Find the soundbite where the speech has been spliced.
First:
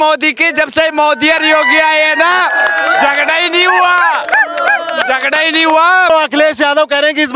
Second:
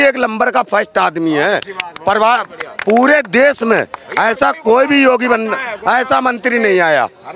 first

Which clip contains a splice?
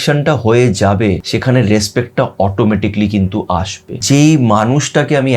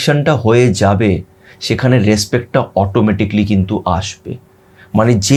first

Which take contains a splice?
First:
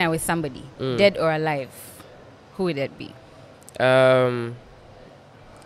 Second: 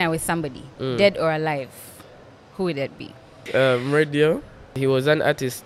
second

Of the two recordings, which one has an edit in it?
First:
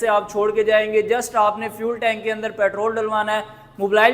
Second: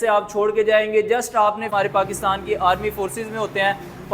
second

